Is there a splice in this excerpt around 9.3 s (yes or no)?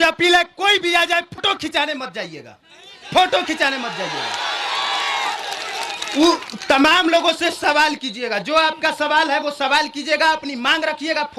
no